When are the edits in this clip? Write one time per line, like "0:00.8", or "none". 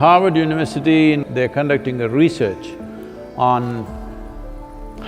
0:01.2

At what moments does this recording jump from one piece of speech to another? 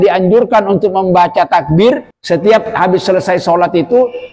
0:02.1

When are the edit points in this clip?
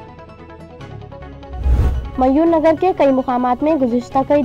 0:01.7

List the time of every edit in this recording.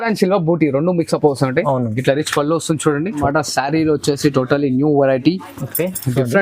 0:03.2

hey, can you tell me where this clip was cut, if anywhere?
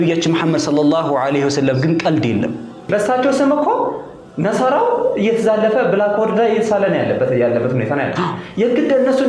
0:02.9

